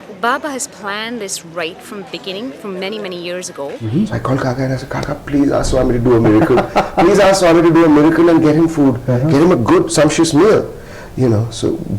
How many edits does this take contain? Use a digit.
1